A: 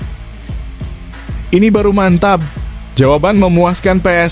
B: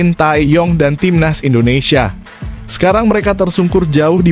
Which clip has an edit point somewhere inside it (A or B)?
A